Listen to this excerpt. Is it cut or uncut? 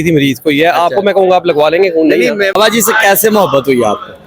cut